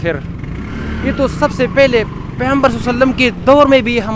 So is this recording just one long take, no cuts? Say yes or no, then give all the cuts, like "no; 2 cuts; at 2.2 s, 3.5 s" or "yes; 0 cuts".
yes; 0 cuts